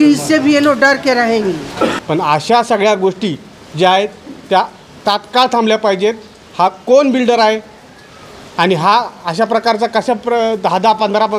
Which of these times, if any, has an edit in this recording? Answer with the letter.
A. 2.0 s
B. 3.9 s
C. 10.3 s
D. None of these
A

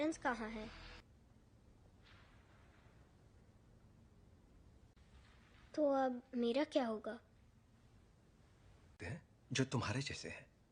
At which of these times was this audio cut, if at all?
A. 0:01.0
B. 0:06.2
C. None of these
A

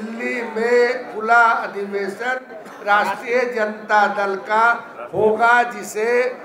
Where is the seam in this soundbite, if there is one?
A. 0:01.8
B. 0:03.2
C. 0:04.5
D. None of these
D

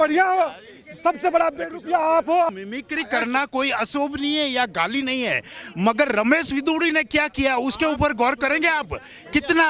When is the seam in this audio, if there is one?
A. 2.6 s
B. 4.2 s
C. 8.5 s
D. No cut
A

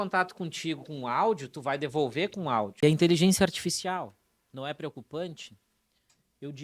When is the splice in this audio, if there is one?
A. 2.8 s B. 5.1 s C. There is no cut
A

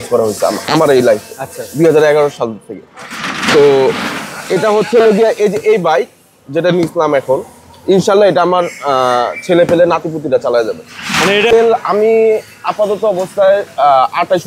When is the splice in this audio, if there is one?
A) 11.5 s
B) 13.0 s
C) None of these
A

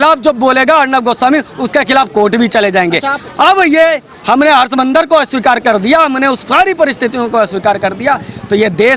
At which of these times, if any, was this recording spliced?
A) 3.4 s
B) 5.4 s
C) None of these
C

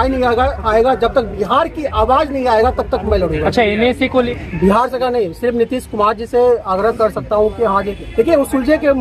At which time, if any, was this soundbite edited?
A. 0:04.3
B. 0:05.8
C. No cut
A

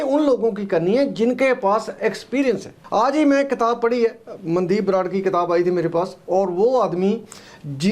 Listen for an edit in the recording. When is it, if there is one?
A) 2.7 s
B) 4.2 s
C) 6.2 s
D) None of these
A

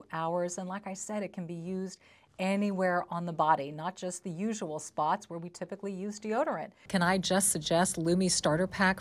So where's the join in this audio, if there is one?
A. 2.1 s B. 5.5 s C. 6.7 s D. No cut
C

